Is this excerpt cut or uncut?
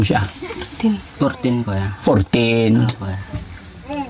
uncut